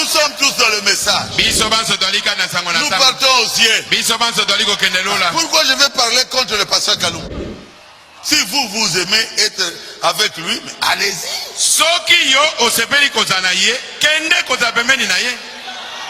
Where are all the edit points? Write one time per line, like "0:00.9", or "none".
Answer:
0:07.3